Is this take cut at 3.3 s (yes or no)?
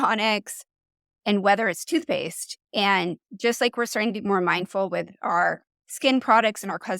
yes